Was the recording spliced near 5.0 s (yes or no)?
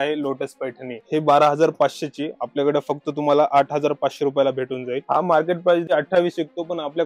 yes